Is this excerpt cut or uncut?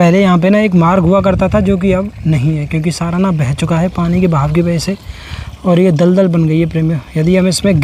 uncut